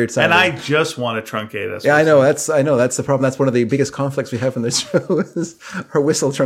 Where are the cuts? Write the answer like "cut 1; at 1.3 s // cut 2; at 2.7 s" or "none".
none